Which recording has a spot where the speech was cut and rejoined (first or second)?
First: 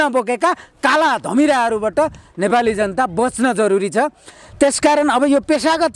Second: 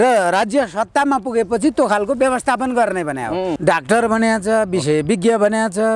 second